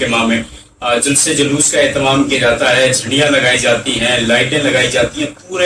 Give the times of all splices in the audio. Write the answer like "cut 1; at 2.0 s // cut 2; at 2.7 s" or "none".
none